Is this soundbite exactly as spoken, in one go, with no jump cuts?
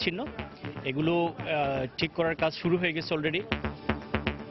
no; 1 cut; at 3.5 s

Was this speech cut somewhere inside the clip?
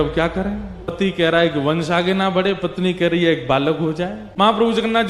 yes; 2 cuts; at 0.9 s, 4.2 s

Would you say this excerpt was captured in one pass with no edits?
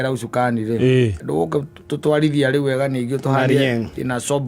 no; 1 cut; at 1.2 s

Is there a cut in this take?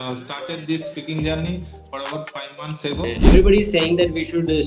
yes; 1 cut; at 3.2 s

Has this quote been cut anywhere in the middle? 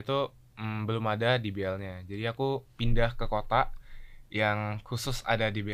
no; 0 cuts

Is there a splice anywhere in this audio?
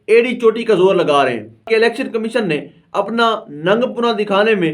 yes; 1 cut; at 1.6 s

